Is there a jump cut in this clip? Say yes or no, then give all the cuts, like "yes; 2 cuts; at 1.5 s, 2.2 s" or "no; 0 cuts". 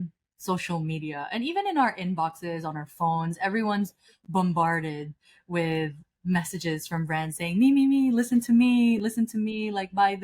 no; 0 cuts